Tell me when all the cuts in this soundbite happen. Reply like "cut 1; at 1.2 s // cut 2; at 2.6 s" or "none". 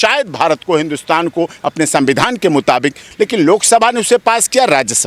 cut 1; at 3.0 s